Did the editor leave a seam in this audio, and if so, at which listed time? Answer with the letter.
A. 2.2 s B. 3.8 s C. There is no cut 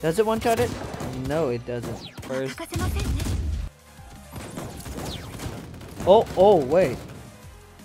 A